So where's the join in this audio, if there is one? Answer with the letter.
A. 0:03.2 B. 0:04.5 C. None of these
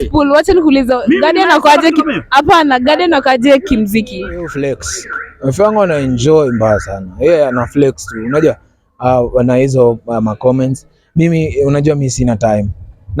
B